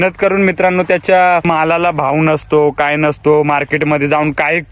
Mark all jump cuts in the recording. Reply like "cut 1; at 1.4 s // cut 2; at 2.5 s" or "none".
cut 1; at 1.5 s